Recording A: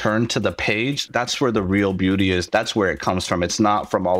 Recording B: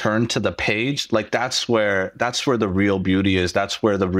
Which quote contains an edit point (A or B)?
A